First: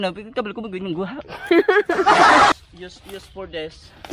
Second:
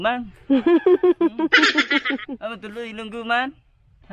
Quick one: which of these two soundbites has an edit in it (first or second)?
first